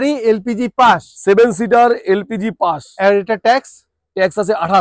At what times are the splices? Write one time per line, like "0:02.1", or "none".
none